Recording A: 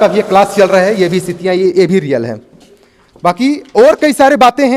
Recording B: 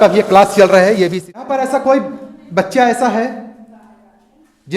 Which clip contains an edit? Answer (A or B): B